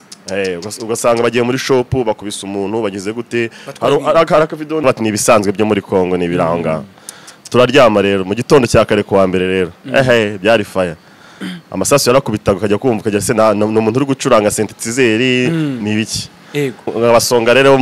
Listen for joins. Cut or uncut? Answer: cut